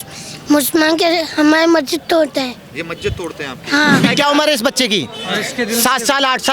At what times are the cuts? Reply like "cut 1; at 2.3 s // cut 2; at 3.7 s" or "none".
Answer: cut 1; at 4.0 s